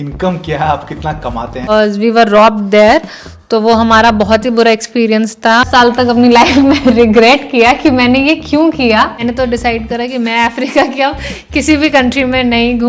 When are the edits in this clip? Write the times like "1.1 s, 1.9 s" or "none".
1.7 s, 6.1 s, 9.2 s